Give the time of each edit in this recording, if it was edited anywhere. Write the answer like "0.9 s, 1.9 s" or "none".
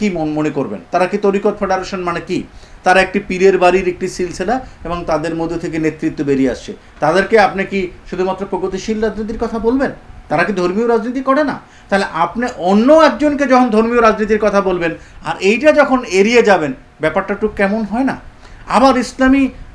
none